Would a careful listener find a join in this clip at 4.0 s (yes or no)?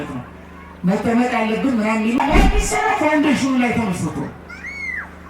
no